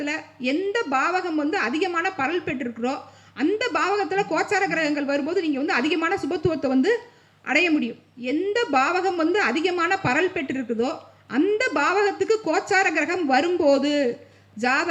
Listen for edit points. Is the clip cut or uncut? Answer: cut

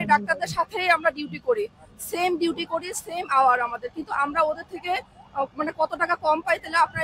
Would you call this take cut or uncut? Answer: uncut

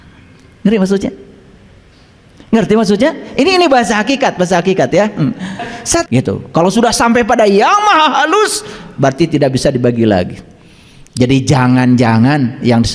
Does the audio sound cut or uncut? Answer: cut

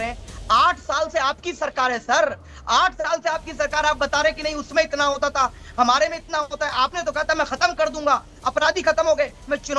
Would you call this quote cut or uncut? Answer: uncut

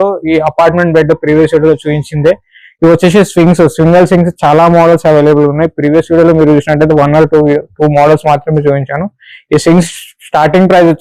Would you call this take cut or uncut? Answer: uncut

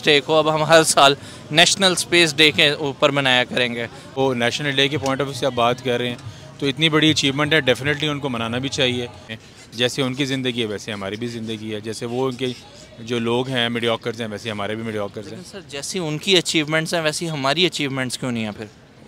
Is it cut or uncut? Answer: cut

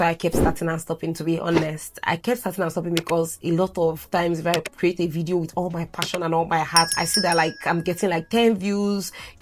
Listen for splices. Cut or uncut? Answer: uncut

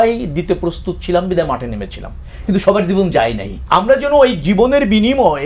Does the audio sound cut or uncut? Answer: cut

